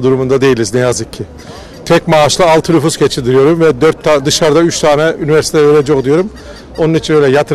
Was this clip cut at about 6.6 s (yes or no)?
no